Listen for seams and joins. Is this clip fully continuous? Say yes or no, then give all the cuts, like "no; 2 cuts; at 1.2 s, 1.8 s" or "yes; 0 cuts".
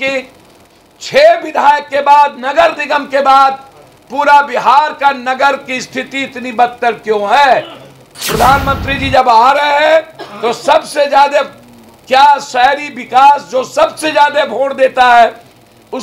yes; 0 cuts